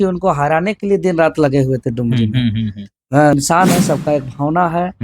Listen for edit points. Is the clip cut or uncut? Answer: cut